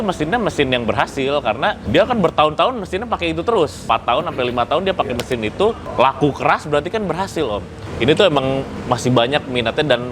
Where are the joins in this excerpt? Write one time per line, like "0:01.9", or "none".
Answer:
0:01.8
0:03.8
0:05.8
0:07.8
0:08.7